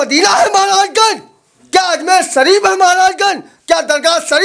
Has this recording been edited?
no; 0 cuts

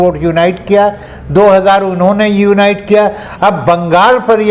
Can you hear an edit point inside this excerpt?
no; 0 cuts

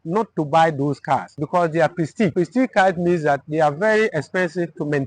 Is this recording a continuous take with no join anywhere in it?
no; 2 cuts; at 1.3 s, 2.3 s

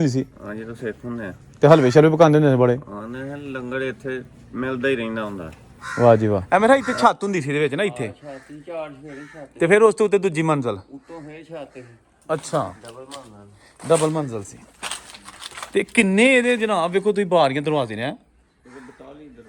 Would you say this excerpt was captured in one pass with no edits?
no; 1 cut; at 6.4 s

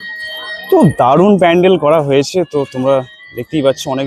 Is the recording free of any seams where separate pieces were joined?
yes; 0 cuts

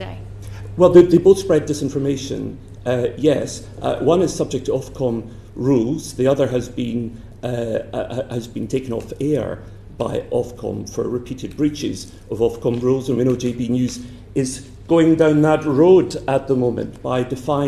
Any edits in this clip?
no; 0 cuts

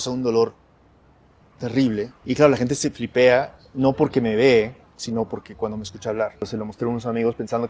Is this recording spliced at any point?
yes; 2 cuts; at 2.2 s, 6.4 s

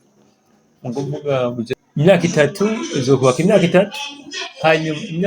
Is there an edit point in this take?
yes; 1 cut; at 1.8 s

